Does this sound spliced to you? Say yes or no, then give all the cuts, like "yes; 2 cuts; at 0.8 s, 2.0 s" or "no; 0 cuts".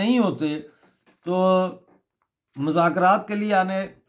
no; 0 cuts